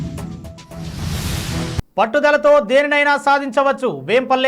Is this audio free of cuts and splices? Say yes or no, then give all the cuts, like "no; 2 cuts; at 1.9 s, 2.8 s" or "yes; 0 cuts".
no; 1 cut; at 1.7 s